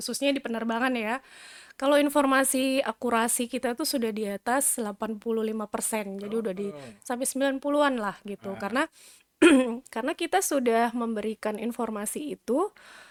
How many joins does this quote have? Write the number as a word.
zero